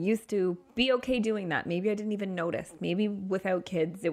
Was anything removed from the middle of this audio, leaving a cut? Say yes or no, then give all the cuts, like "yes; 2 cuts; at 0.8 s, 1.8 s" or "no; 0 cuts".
no; 0 cuts